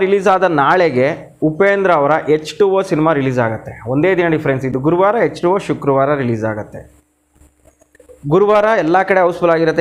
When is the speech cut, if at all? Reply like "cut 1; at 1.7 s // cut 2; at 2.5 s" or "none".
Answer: none

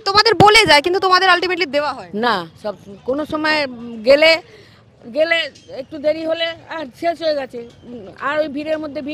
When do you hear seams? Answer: none

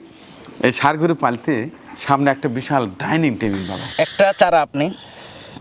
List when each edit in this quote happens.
cut 1; at 3.8 s

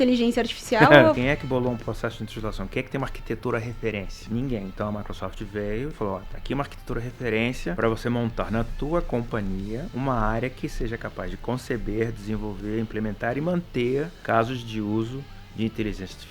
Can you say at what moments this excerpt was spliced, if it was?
cut 1; at 1.2 s // cut 2; at 4.1 s // cut 3; at 7.8 s // cut 4; at 9.9 s // cut 5; at 14.2 s

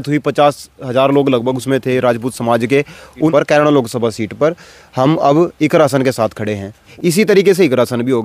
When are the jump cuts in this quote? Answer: cut 1; at 3.3 s // cut 2; at 6.9 s

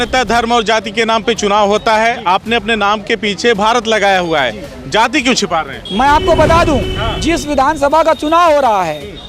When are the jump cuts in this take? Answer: cut 1; at 5.8 s

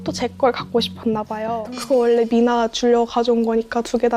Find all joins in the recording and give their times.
cut 1; at 1.5 s

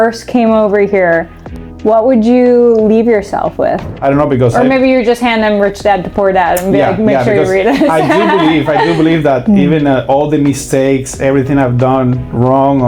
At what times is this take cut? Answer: cut 1; at 3.9 s

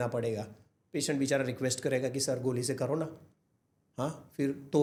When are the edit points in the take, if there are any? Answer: none

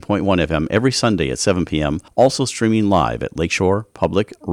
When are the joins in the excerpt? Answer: cut 1; at 2.0 s

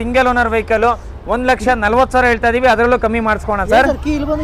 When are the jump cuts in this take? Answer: none

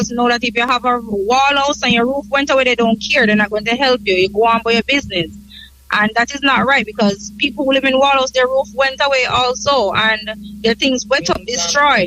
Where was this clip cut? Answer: none

